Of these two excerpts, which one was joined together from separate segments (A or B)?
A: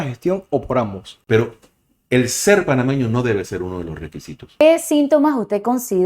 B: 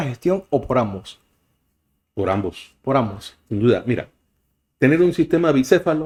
A